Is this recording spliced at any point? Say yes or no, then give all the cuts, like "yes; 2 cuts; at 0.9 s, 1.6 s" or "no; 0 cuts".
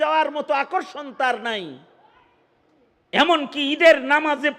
no; 0 cuts